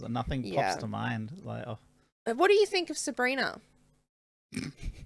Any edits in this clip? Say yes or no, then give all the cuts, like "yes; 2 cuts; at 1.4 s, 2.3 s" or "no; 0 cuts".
no; 0 cuts